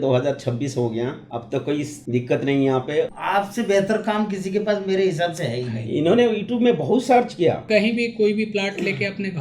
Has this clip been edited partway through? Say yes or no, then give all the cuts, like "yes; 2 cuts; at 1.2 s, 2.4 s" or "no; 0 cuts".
yes; 3 cuts; at 1.8 s, 3.1 s, 7.6 s